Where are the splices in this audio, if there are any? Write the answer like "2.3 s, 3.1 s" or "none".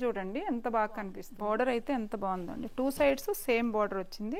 1.2 s